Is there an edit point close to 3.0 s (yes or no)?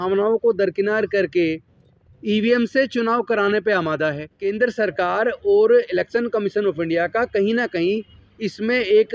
no